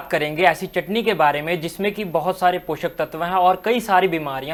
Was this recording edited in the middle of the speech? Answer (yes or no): no